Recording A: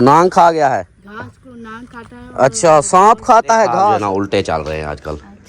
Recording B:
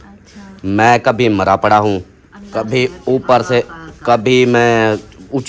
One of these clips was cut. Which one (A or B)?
A